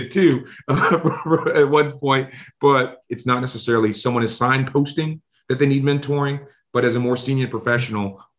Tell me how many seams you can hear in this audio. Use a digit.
1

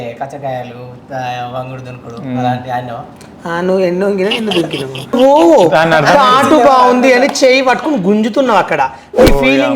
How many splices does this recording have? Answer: 1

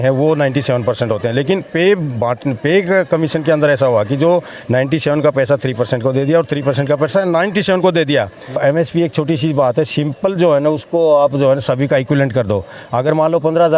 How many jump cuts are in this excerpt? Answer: 1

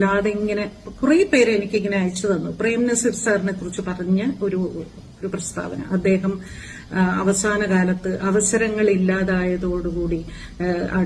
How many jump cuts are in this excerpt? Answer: 0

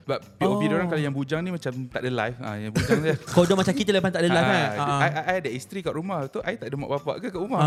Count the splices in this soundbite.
0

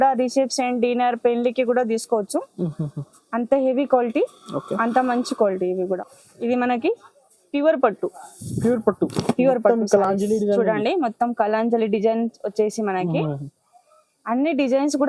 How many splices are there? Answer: 1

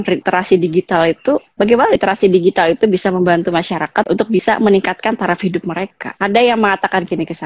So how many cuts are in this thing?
2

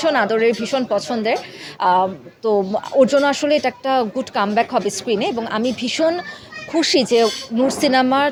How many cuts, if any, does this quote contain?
0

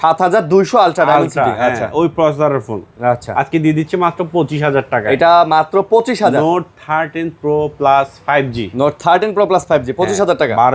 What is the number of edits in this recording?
0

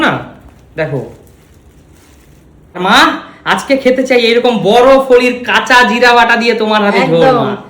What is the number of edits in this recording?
1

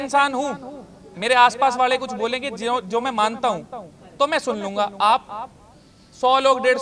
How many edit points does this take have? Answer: 0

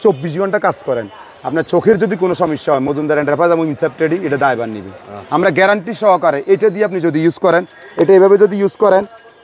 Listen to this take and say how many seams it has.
0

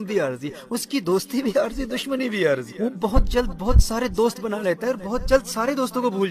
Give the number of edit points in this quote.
1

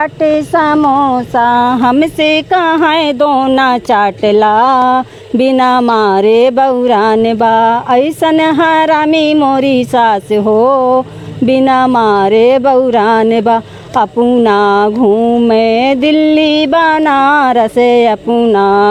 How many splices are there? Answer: 0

